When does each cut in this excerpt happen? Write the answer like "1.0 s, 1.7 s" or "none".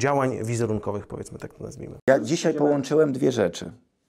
1.9 s